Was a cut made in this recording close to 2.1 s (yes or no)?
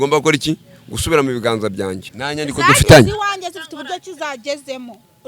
yes